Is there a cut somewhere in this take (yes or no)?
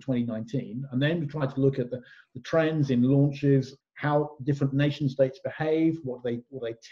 yes